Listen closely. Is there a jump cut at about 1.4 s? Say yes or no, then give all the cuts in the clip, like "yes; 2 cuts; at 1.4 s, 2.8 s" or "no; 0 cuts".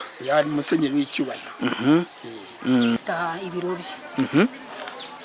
no; 1 cut; at 3.0 s